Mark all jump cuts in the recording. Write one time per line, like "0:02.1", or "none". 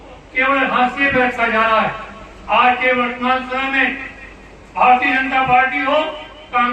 none